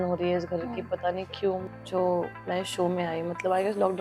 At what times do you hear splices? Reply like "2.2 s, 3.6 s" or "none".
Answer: 1.7 s

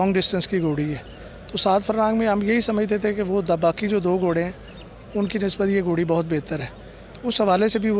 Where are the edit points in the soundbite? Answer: none

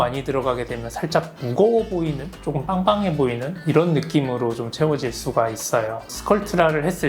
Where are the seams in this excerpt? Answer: none

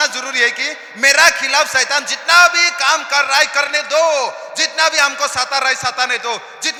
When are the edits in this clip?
none

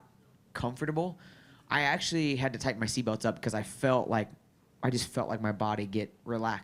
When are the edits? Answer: none

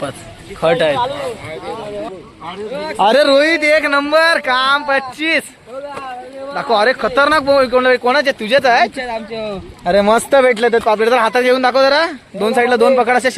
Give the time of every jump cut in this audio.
2.1 s

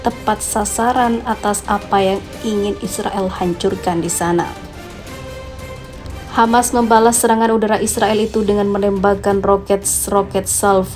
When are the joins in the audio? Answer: 4.7 s, 6.1 s

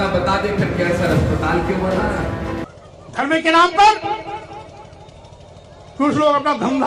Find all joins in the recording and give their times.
2.7 s

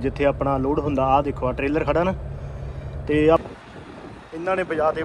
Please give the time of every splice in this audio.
3.4 s

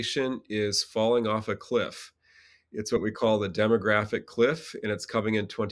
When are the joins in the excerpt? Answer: none

